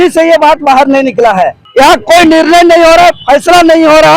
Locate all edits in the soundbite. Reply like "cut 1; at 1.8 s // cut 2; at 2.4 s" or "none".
cut 1; at 1.6 s

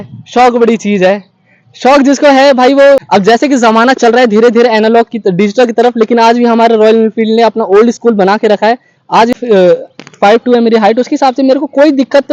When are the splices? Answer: cut 1; at 3.0 s // cut 2; at 9.3 s

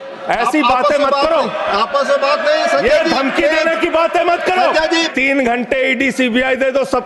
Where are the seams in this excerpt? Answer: cut 1; at 5.1 s

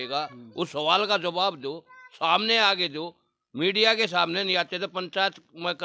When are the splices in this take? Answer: none

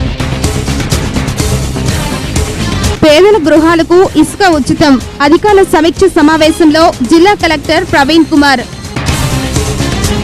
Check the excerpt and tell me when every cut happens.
cut 1; at 1.4 s

